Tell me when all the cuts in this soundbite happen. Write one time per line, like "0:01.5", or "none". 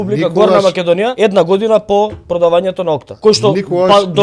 0:01.1
0:03.1